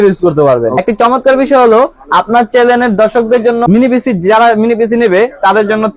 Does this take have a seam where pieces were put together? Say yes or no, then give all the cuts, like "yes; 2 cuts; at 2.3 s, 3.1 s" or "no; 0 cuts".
yes; 2 cuts; at 0.8 s, 3.6 s